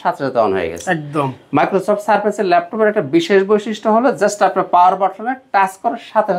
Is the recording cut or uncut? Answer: uncut